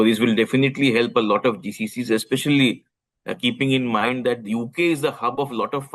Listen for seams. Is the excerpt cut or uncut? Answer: uncut